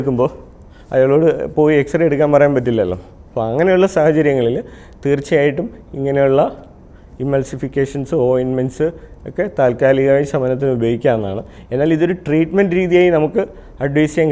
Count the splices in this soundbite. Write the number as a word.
zero